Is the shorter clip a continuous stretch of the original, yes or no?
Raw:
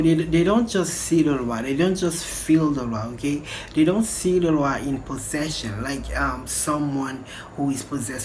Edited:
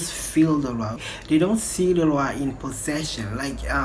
no